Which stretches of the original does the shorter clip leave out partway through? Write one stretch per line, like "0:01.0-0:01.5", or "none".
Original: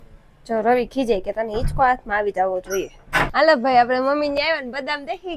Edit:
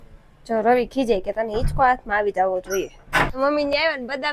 0:03.3-0:04.0